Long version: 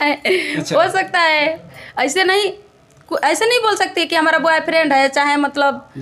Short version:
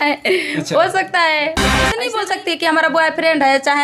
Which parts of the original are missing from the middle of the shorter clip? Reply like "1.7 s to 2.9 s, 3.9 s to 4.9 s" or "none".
1.9 s to 3.4 s

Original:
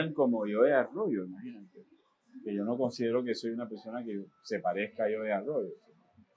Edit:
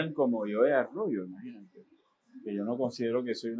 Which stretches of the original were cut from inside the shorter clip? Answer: none

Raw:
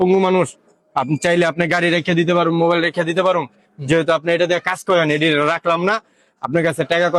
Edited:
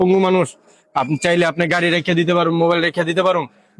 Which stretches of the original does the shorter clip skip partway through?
none

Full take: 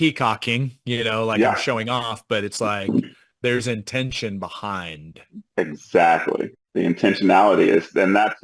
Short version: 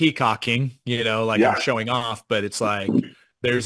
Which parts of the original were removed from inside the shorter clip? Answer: none

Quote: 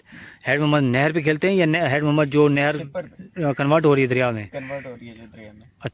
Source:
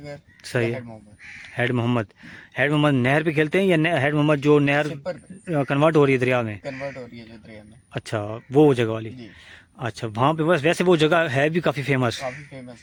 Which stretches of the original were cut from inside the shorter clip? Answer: none

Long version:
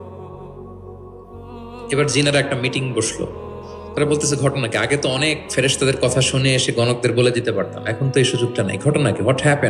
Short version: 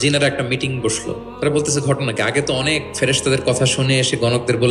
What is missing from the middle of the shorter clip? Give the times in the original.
3.4 s to 3.8 s

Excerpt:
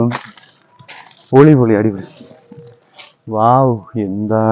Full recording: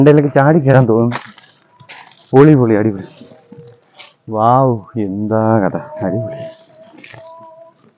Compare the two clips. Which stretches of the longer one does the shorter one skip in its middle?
none

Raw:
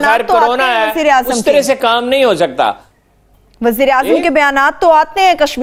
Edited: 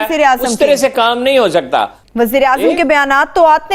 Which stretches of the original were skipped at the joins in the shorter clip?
2.9 s to 3.5 s

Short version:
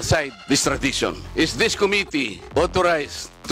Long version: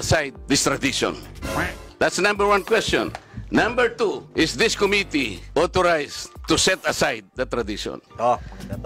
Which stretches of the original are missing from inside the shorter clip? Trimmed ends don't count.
1.2 s to 4.2 s

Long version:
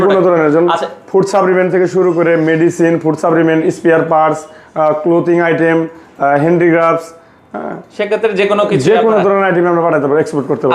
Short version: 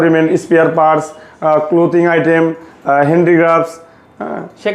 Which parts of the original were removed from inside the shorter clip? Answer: none

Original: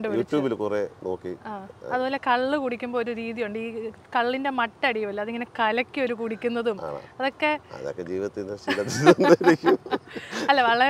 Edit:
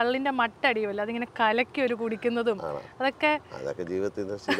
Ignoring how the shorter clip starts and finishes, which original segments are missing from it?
none

